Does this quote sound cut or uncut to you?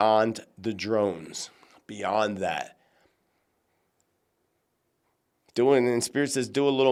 uncut